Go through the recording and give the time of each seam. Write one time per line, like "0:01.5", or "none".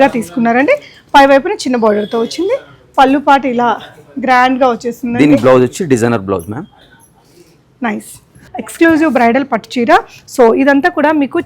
0:06.8
0:08.4